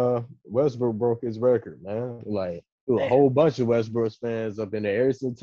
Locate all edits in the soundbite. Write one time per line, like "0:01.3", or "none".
none

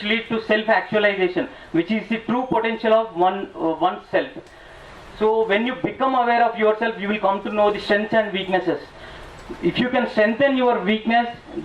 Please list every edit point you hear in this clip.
none

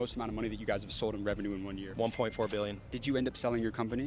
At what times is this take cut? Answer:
0:01.8
0:02.9

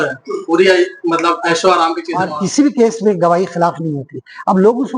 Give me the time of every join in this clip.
0:02.1

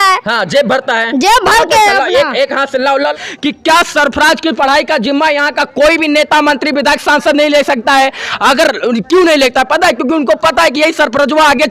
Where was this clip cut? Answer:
0:03.1

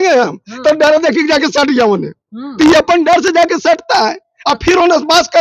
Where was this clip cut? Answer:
none

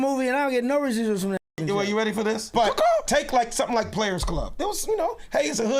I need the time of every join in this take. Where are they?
0:02.5

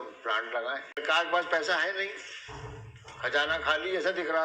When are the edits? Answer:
0:01.0

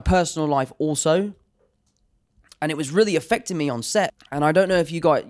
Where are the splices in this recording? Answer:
0:04.2

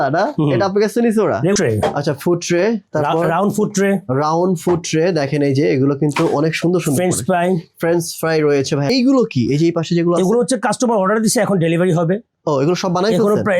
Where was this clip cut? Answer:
0:01.6
0:08.9

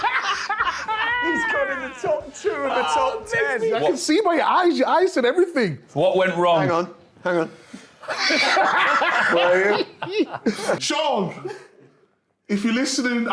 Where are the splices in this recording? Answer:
0:03.7
0:10.8

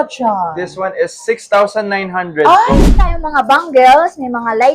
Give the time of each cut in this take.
0:02.8

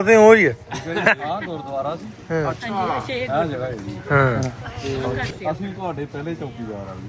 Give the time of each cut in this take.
0:04.7

